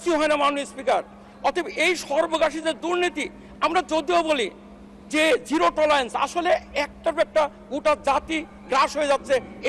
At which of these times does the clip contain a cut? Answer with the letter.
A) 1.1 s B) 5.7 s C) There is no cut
C